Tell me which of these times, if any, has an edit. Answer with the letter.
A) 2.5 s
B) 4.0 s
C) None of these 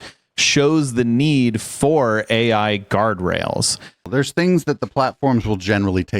B